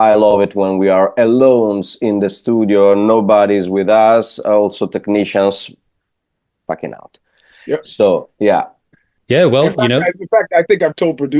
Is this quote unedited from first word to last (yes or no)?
yes